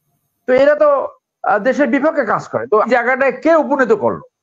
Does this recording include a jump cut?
yes; 1 cut; at 2.9 s

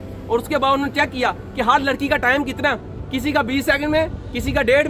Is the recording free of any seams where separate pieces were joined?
yes; 0 cuts

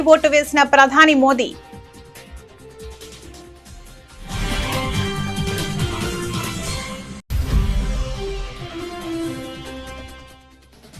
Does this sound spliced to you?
no; 0 cuts

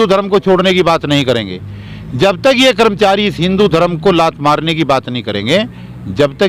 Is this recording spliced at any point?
no; 0 cuts

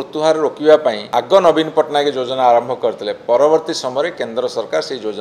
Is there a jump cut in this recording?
yes; 1 cut; at 1.0 s

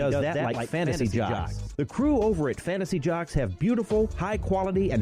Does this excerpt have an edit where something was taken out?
no; 0 cuts

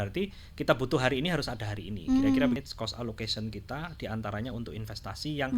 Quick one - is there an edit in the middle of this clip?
yes; 1 cut; at 2.6 s

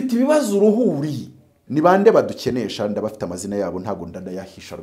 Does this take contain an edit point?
yes; 1 cut; at 1.6 s

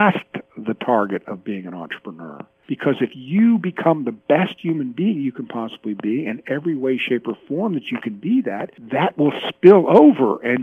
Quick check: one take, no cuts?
no; 2 cuts; at 2.5 s, 8.7 s

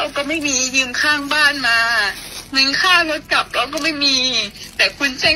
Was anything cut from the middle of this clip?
no; 0 cuts

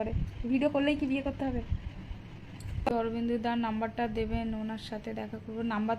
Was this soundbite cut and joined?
yes; 1 cut; at 2.9 s

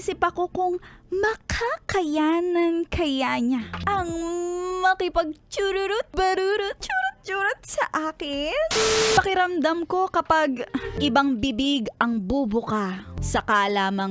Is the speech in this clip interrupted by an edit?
yes; 6 cuts; at 3.7 s, 6.1 s, 6.8 s, 9.1 s, 10.9 s, 13.1 s

